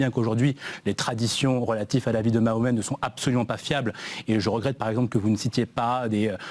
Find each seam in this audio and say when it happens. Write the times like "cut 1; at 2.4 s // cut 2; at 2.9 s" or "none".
cut 1; at 4.9 s